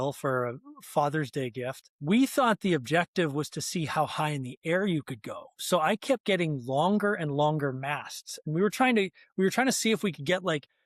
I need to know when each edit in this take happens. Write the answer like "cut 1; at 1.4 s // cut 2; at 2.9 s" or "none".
cut 1; at 1.8 s